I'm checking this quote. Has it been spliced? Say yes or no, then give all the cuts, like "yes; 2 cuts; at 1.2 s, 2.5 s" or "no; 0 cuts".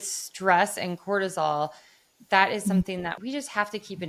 yes; 1 cut; at 3.2 s